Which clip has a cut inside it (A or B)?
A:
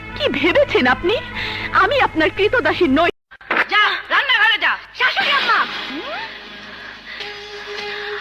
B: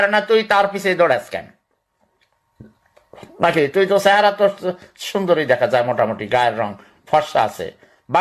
A